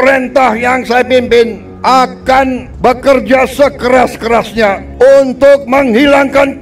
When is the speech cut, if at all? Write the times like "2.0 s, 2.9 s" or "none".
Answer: 1.7 s, 2.7 s, 4.8 s